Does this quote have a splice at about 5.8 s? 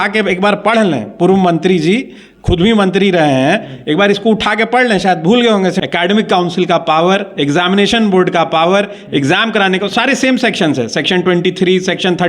yes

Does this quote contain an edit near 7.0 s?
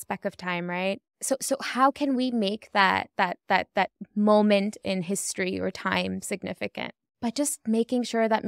yes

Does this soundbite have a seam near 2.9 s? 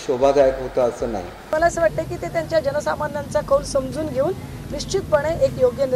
no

